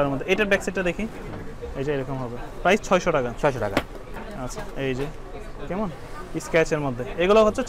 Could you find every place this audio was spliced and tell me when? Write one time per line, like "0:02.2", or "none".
none